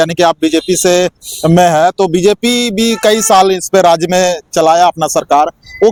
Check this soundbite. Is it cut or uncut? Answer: uncut